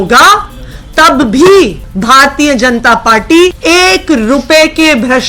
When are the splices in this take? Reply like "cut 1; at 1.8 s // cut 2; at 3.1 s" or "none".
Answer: cut 1; at 1.9 s // cut 2; at 3.6 s